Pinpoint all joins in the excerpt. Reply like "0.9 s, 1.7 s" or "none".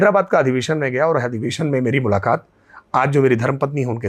none